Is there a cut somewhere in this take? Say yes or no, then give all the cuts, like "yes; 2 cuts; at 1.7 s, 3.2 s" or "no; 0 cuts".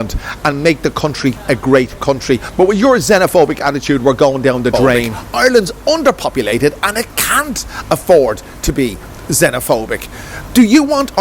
yes; 1 cut; at 5.2 s